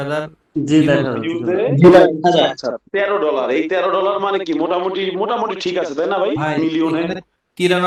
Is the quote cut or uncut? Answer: uncut